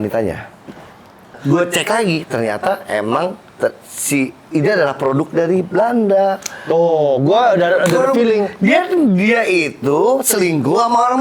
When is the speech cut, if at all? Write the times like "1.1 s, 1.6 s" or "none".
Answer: 1.4 s